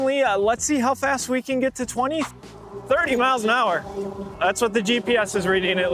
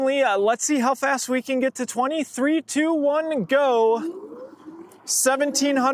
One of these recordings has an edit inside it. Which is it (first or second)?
first